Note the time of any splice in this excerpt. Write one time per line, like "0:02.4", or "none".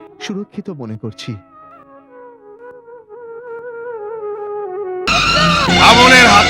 0:05.1